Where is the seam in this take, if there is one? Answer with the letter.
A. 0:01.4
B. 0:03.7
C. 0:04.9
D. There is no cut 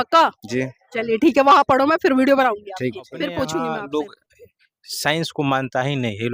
B